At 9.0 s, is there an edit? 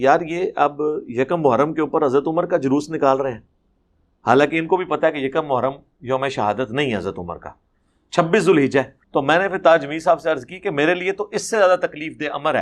yes; 1 cut; at 9.0 s

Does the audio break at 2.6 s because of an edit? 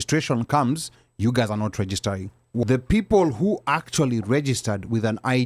yes; 1 cut; at 2.6 s

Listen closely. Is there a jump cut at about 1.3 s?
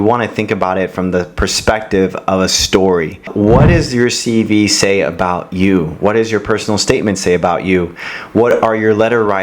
no; 1 cut; at 3.3 s

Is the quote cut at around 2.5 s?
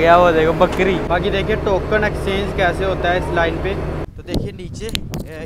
no; 2 cuts; at 1.0 s, 4.1 s

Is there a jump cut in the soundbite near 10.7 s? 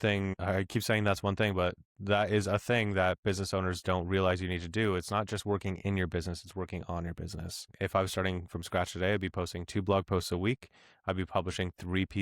no; 1 cut; at 7.7 s

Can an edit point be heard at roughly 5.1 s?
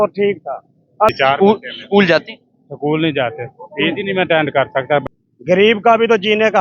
yes; 2 cuts; at 1.1 s, 5.1 s

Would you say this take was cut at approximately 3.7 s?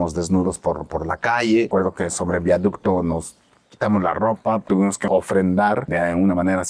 no; 3 cuts; at 1.7 s, 5.0 s, 5.9 s

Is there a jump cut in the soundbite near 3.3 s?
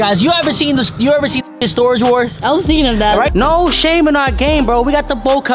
yes; 1 cut; at 3.3 s

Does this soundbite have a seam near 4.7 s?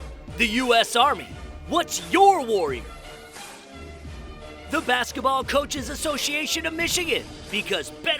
yes; 2 cuts; at 2.8 s, 4.7 s

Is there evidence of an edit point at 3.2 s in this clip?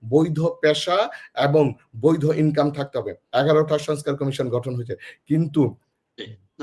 yes; 1 cut; at 3.2 s

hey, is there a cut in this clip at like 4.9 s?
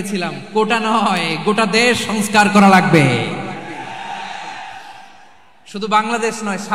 no; 0 cuts

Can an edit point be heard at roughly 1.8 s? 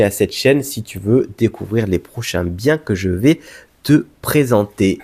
no; 0 cuts

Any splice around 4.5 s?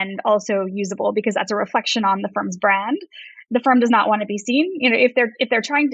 no; 1 cut; at 3.3 s

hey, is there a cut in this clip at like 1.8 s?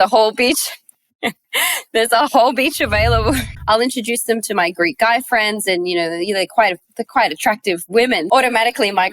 no; 2 cuts; at 3.5 s, 8.2 s

